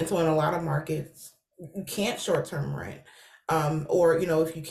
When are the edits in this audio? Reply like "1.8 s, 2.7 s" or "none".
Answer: none